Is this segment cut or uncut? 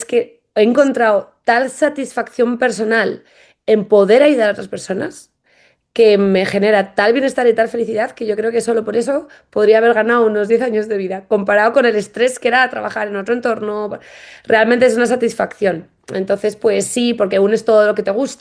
uncut